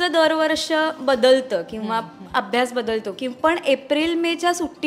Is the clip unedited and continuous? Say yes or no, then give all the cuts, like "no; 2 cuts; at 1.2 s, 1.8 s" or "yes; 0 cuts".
yes; 0 cuts